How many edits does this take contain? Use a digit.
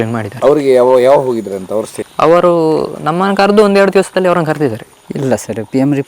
1